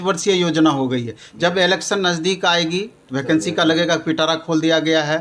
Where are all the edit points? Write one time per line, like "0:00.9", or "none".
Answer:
none